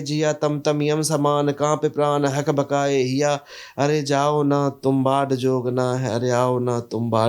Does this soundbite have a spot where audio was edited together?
no; 0 cuts

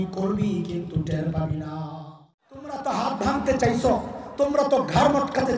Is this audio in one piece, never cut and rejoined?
no; 1 cut; at 2.8 s

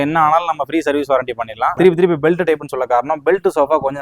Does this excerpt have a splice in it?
yes; 1 cut; at 1.7 s

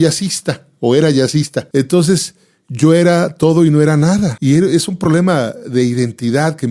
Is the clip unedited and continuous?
no; 2 cuts; at 1.7 s, 4.4 s

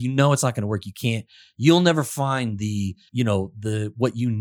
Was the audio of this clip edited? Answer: yes; 1 cut; at 3.0 s

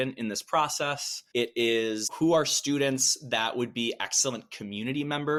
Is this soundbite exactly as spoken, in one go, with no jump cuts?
yes; 0 cuts

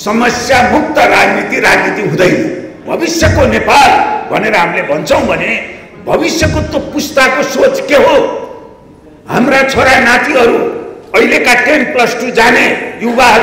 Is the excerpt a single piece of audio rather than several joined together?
no; 1 cut; at 2.8 s

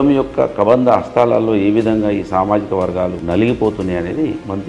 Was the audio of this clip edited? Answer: yes; 1 cut; at 3.2 s

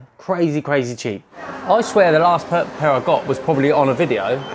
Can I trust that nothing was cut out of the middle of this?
no; 1 cut; at 1.5 s

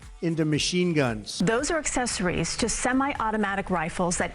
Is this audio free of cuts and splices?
no; 1 cut; at 1.3 s

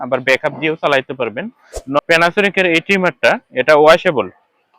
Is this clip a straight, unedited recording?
no; 1 cut; at 2.0 s

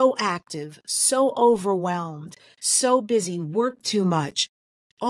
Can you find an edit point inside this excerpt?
no; 0 cuts

